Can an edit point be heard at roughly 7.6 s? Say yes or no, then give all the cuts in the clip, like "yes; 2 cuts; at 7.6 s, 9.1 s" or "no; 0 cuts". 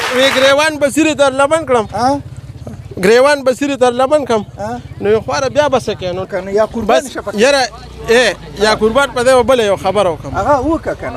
no; 1 cut; at 6.2 s